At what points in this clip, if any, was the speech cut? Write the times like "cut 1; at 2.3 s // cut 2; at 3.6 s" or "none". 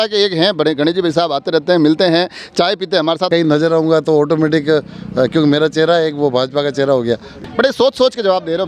cut 1; at 3.3 s // cut 2; at 7.3 s

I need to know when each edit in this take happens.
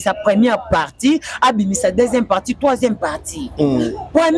none

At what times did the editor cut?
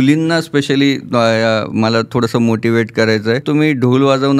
cut 1; at 3.4 s

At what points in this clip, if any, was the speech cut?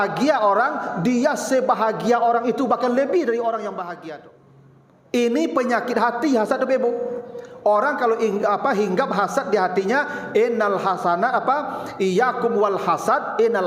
cut 1; at 4.0 s

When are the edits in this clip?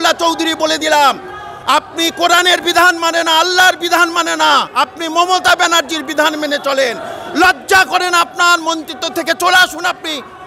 none

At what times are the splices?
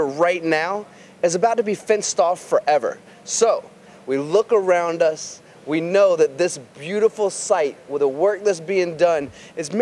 cut 1; at 3.8 s

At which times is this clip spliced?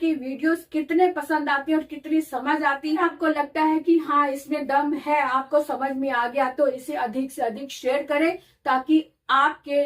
cut 1; at 3.0 s

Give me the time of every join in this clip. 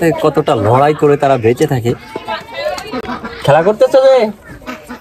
none

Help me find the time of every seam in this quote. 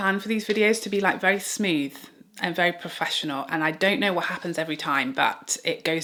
none

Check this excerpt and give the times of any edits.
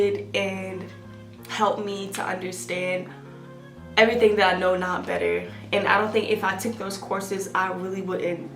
none

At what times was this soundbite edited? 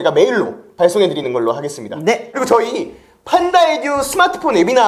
cut 1; at 2.3 s

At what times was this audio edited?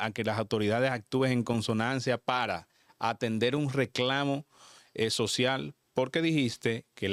none

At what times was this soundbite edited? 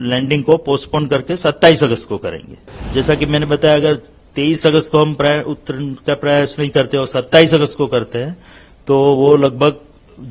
cut 1; at 2.8 s

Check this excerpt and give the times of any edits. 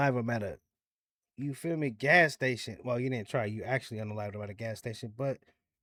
none

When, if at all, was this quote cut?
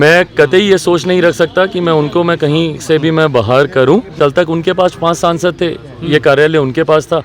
cut 1; at 4.1 s

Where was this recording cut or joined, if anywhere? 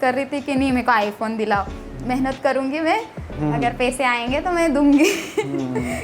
none

